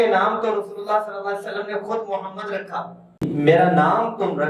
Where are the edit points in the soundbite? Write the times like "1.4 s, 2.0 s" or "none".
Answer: 3.2 s